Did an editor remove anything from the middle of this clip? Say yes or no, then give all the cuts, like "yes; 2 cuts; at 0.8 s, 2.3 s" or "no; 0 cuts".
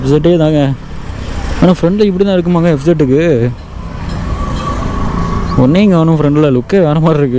no; 0 cuts